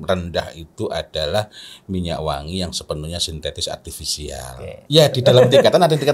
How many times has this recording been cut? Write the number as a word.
one